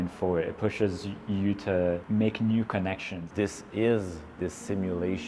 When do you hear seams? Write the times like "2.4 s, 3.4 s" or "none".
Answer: 2.0 s, 3.2 s